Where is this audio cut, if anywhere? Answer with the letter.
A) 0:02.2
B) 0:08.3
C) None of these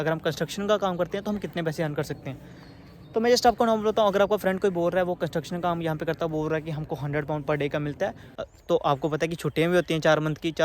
B